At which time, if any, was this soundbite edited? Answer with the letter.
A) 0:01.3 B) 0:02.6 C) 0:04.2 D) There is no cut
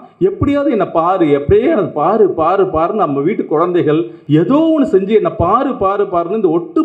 C